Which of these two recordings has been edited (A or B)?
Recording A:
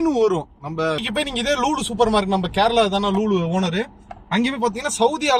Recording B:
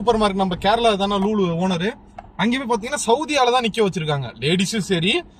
A